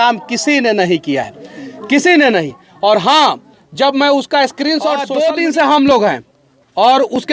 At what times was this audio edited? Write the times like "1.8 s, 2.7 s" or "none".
5.1 s